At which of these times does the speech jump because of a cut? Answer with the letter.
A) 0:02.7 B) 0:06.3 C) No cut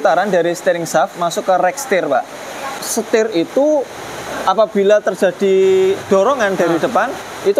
A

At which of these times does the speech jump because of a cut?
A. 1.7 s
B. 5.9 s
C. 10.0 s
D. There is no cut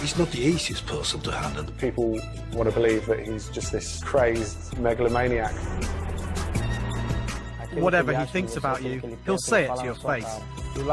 A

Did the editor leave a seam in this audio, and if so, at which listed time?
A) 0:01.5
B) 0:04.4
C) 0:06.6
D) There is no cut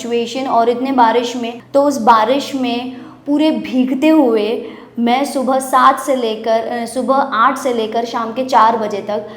A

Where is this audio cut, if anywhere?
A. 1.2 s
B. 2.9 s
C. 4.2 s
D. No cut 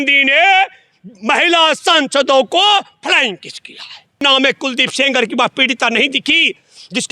C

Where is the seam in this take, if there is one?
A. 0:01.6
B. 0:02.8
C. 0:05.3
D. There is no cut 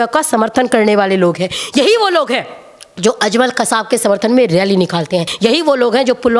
C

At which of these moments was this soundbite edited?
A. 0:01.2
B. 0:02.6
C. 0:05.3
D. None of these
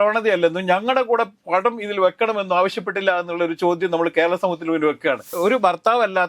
C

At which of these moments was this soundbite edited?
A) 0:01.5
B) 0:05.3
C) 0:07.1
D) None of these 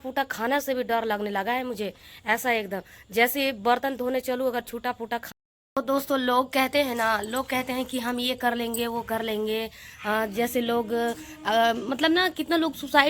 B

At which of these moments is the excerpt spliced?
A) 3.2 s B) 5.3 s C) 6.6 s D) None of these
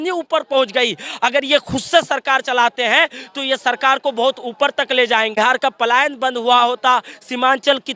B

